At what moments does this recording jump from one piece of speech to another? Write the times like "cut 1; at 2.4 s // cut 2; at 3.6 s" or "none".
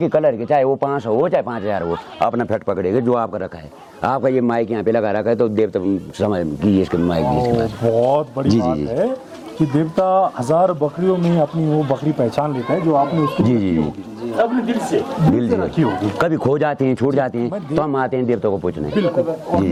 none

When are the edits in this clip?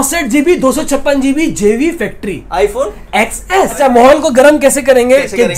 cut 1; at 3.8 s

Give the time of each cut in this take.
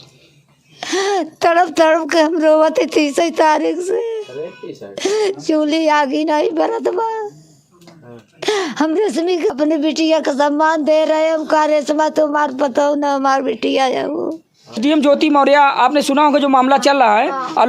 cut 1; at 9.5 s // cut 2; at 14.8 s

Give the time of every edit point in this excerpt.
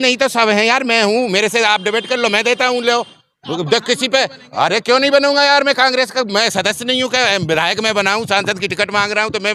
none

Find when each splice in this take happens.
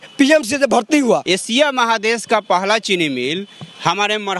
cut 1; at 1.2 s

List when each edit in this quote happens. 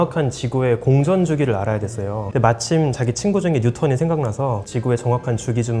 cut 1; at 2.2 s // cut 2; at 4.6 s

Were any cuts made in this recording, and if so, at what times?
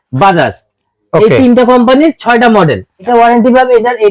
cut 1; at 2.9 s

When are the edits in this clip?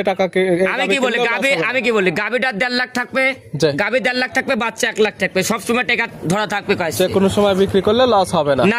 none

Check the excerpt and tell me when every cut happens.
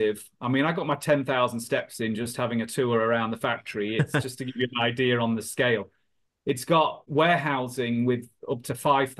cut 1; at 7.0 s

